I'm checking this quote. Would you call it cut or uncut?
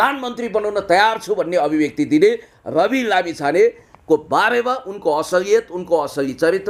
uncut